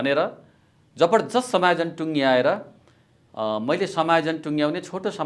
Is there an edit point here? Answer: no; 0 cuts

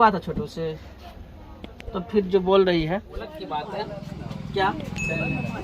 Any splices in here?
yes; 1 cut; at 3.4 s

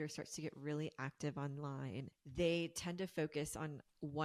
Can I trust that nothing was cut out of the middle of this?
no; 1 cut; at 2.2 s

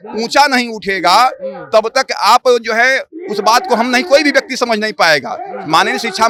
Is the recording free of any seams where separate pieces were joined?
yes; 0 cuts

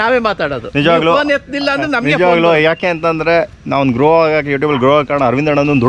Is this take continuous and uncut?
yes; 0 cuts

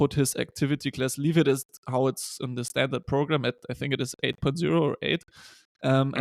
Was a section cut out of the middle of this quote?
no; 0 cuts

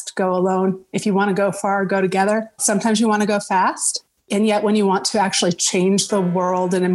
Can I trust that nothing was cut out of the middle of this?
no; 1 cut; at 2.6 s

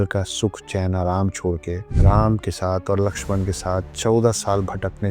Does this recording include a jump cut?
yes; 1 cut; at 1.9 s

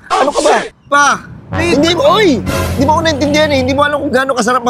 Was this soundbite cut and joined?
yes; 1 cut; at 0.9 s

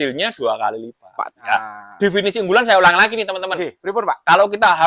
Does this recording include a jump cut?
yes; 1 cut; at 1.3 s

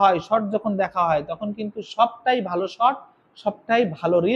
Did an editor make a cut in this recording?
no; 0 cuts

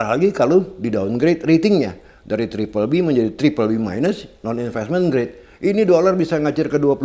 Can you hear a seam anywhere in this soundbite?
no; 0 cuts

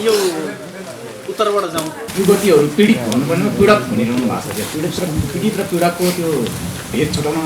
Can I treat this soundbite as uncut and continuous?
no; 1 cut; at 2.0 s

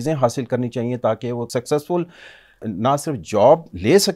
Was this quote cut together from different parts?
yes; 2 cuts; at 1.5 s, 2.6 s

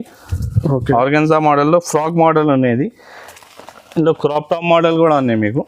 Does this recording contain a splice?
no; 0 cuts

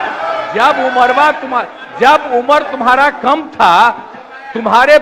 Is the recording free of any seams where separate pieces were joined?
yes; 0 cuts

